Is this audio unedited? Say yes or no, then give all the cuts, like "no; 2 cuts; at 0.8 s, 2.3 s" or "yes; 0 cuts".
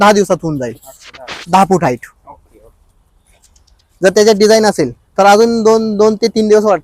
yes; 0 cuts